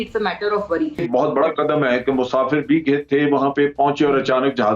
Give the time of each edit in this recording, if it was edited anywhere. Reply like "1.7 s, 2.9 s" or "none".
1.0 s